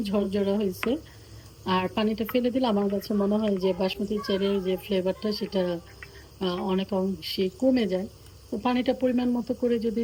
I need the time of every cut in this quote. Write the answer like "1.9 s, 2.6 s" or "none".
none